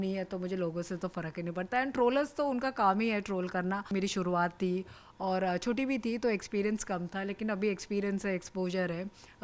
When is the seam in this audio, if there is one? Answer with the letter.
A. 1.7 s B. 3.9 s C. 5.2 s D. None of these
B